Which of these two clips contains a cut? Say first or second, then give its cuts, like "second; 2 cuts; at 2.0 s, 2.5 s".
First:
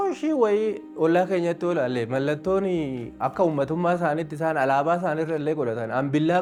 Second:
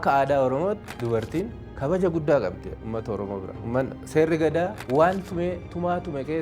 second; 3 cuts; at 0.9 s, 3.5 s, 4.8 s